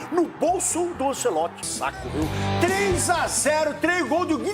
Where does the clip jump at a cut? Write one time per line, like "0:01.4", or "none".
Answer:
0:01.6